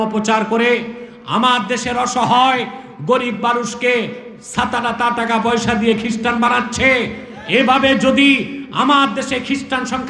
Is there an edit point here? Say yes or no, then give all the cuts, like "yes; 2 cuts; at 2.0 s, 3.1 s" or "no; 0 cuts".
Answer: no; 0 cuts